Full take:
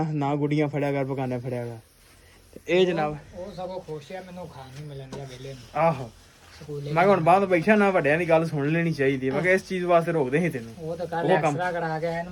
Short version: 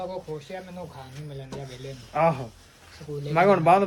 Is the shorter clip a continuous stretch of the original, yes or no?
yes